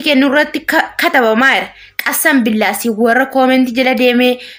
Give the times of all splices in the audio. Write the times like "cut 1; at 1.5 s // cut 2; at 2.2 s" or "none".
none